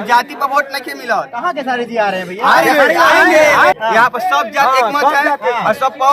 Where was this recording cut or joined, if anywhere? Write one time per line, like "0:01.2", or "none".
0:03.8

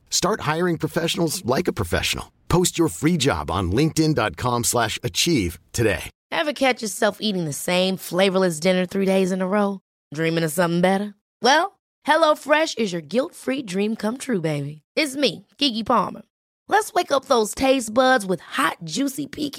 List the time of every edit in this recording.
0:06.1

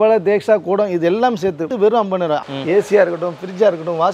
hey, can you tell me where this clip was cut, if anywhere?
0:01.7
0:02.5

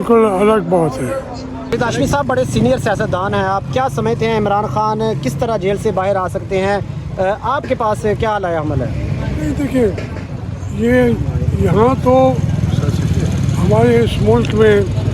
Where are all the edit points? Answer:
0:01.7

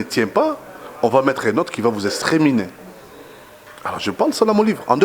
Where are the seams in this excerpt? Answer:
none

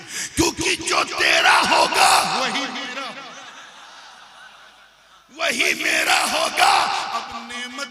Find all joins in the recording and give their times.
none

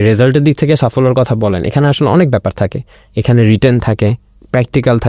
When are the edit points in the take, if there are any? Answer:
none

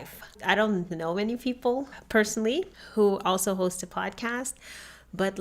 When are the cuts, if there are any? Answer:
0:02.8

